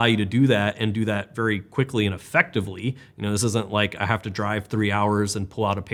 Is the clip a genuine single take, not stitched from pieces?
yes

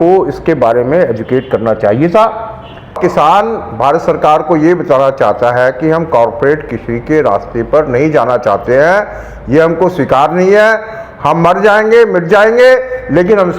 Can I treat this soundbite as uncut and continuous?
no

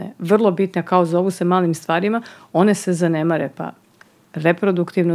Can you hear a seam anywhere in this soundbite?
no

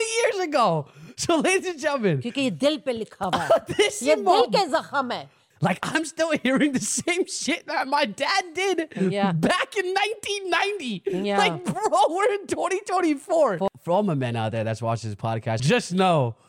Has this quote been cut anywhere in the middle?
yes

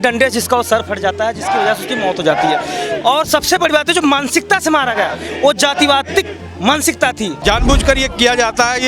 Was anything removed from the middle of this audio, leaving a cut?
yes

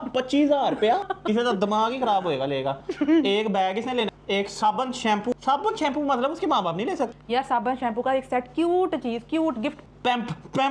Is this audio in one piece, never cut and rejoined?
yes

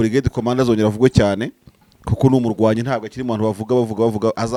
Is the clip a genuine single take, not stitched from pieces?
yes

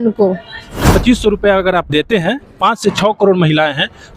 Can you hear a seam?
yes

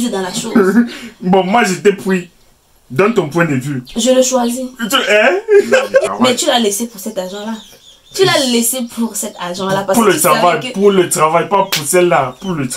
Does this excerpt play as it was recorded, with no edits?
no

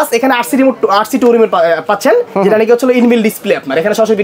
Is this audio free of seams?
yes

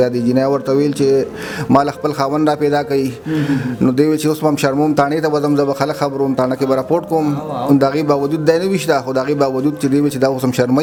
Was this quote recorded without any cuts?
yes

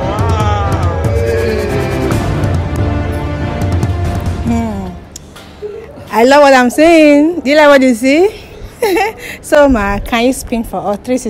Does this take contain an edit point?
no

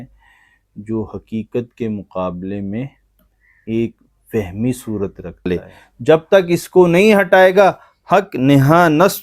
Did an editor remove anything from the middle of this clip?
yes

